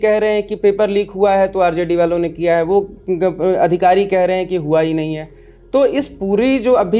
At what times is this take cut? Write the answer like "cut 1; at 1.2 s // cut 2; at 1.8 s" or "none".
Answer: none